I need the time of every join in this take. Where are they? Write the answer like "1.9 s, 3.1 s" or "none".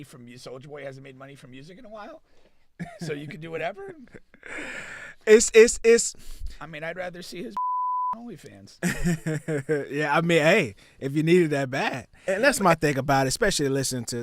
12.2 s